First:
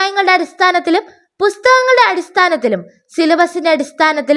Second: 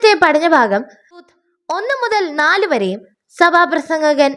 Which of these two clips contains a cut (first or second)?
second